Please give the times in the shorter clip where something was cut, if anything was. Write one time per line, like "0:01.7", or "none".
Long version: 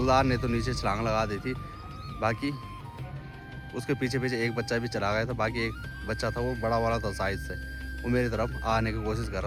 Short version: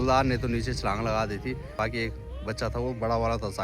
0:01.8